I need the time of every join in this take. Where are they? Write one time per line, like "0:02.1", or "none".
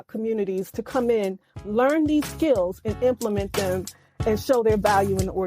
none